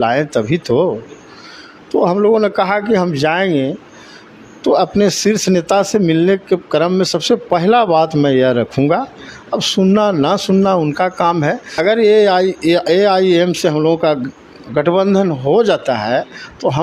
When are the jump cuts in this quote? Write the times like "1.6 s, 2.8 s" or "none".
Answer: 11.7 s